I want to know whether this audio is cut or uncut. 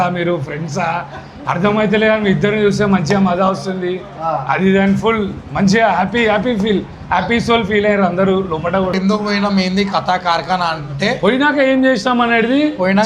cut